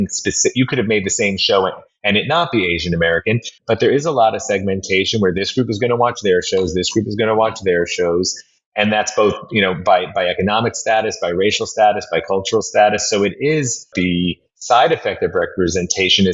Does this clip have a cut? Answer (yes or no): yes